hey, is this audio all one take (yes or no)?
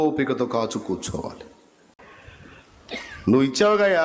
no